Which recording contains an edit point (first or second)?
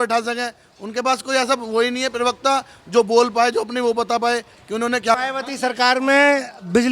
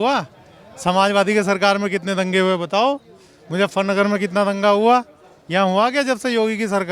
first